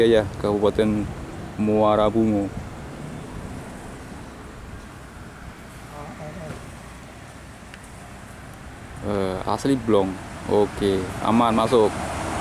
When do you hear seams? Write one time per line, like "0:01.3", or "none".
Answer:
none